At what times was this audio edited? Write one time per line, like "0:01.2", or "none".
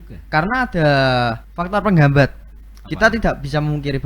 0:01.5

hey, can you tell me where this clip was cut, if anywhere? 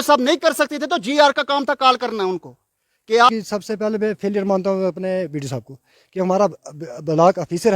0:03.3

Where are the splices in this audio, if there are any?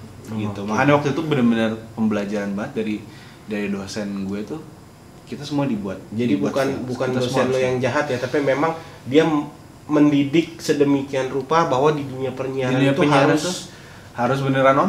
none

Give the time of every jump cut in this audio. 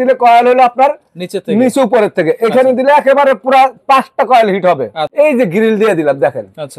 0:05.0

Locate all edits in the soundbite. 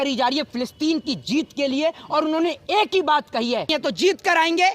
0:03.7

